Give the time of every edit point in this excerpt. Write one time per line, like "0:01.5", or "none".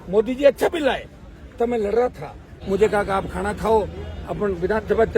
0:02.6